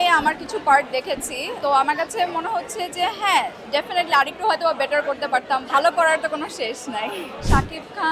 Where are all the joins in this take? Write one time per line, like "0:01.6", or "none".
0:01.5
0:05.6